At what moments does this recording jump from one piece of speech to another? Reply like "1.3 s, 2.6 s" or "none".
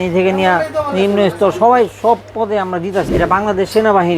3.1 s